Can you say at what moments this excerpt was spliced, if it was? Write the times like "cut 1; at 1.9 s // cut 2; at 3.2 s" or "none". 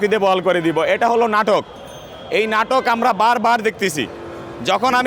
none